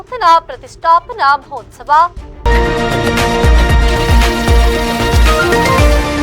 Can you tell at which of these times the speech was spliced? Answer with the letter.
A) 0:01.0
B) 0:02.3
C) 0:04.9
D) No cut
B